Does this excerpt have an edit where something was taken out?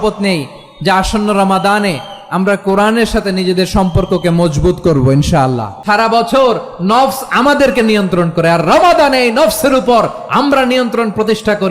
yes; 1 cut; at 5.8 s

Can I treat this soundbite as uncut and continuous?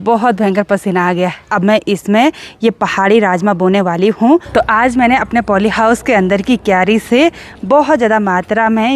no; 2 cuts; at 1.5 s, 4.5 s

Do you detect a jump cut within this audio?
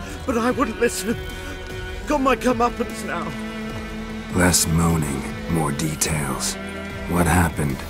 no; 0 cuts

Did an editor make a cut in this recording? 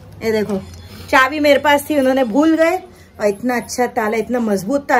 no; 0 cuts

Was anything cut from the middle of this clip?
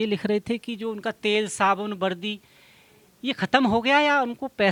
no; 0 cuts

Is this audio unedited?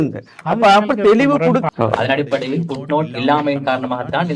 no; 1 cut; at 1.7 s

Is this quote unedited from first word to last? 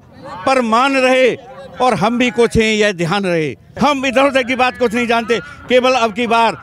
no; 1 cut; at 3.7 s

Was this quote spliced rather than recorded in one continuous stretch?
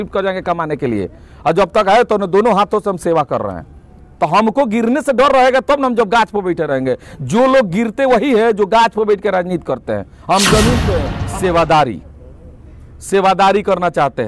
yes; 1 cut; at 11.2 s

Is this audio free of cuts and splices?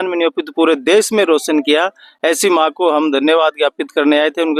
yes; 0 cuts

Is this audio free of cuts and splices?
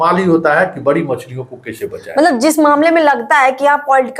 yes; 0 cuts

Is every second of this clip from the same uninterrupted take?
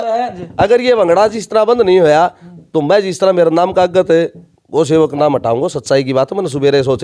yes; 0 cuts

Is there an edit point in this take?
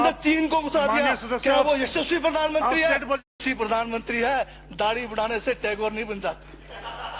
yes; 1 cut; at 3.4 s

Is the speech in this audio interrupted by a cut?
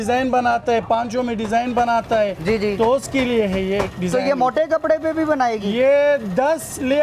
no; 0 cuts

